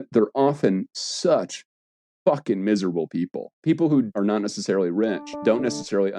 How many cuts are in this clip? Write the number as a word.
three